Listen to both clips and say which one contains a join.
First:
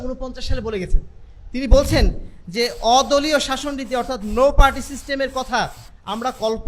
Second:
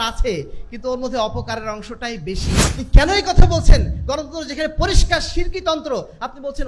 second; 1 cut; at 2.6 s

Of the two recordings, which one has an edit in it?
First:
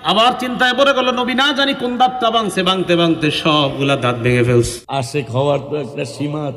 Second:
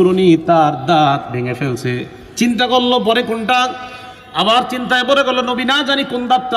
first; 1 cut; at 4.8 s

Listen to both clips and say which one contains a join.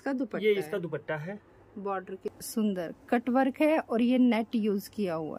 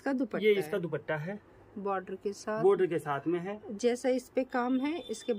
first; 1 cut; at 2.4 s

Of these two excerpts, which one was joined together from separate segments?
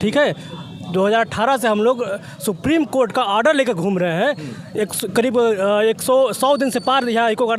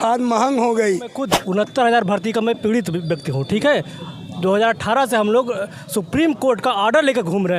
second; 1 cut; at 1.3 s

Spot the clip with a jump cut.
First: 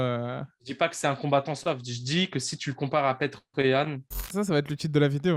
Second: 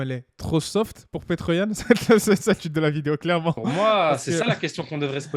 first; 1 cut; at 4.3 s

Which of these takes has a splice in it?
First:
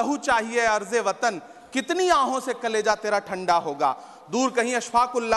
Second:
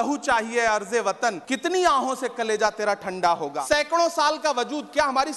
second; 2 cuts; at 1.5 s, 3.5 s

